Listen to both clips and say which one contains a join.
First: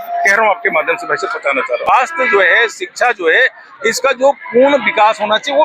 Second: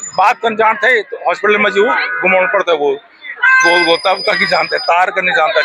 first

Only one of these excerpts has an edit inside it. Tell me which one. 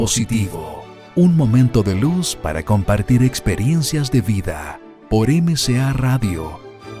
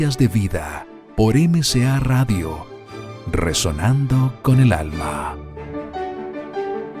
second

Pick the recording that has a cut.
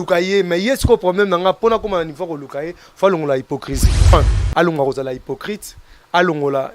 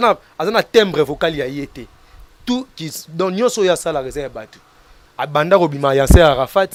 first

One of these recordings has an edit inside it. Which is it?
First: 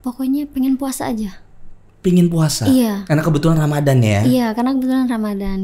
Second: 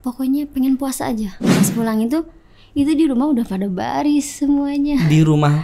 second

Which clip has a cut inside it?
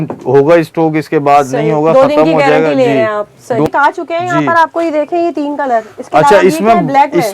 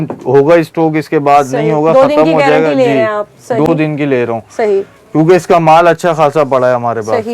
first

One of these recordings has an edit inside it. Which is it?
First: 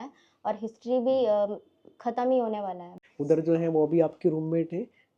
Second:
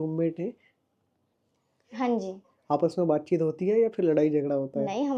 first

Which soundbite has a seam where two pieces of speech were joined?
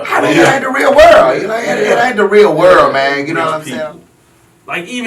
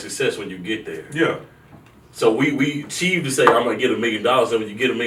first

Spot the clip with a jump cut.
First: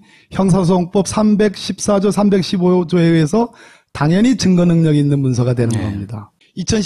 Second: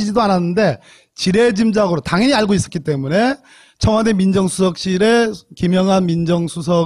second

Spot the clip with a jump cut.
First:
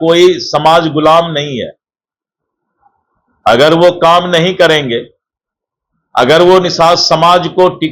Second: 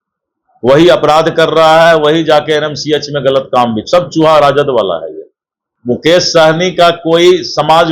second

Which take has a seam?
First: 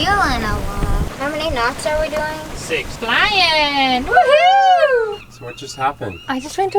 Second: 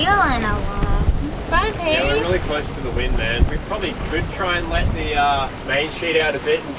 first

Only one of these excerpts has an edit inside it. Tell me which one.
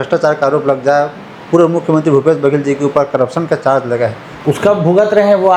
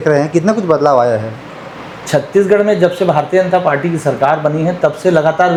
first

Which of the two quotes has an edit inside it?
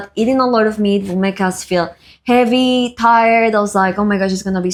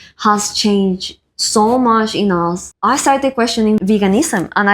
second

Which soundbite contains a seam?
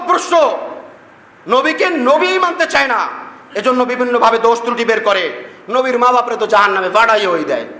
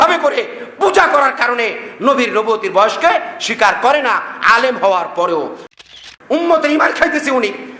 second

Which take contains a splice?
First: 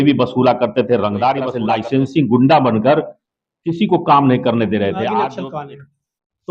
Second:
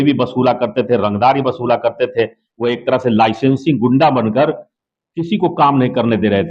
first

